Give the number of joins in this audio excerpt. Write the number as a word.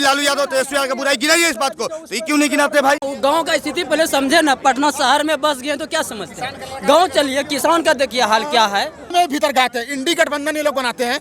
two